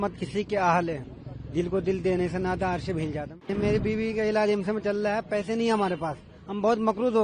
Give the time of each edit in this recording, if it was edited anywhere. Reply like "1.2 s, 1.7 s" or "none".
3.5 s